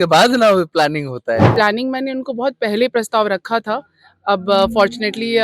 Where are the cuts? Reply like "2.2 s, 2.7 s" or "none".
1.5 s